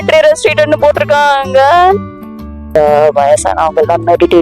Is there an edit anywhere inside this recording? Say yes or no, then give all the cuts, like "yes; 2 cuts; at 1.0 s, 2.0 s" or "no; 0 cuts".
yes; 1 cut; at 2.6 s